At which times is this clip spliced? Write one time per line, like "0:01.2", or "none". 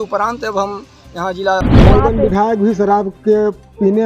0:01.7